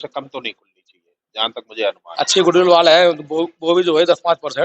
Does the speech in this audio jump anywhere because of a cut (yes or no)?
yes